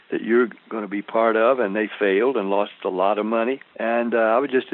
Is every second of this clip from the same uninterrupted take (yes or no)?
no